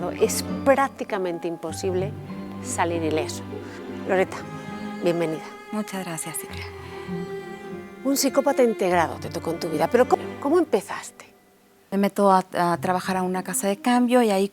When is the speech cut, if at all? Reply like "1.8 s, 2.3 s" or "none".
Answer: 10.2 s